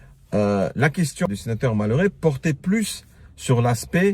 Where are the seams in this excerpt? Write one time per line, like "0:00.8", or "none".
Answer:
0:01.3

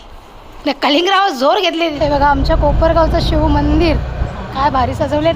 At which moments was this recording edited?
0:01.9

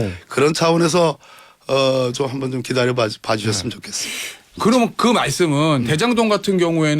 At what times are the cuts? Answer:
0:04.6

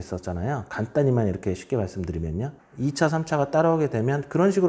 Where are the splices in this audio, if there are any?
0:02.5

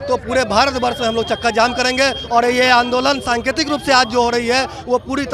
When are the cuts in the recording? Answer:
none

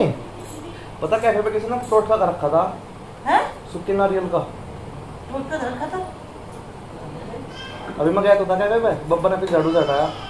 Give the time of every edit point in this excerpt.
none

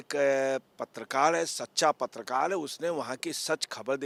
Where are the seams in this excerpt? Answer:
none

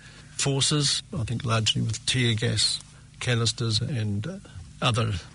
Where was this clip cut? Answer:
0:03.9

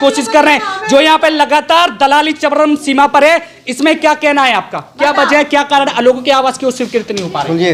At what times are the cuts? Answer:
none

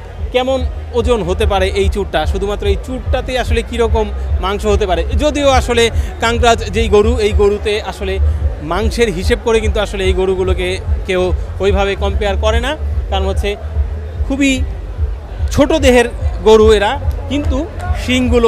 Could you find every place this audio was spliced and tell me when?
none

